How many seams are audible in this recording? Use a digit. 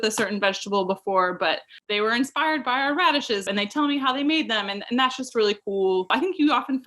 3